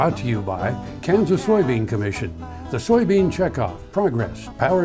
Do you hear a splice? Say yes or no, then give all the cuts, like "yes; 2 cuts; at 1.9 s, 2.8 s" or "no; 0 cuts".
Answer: no; 0 cuts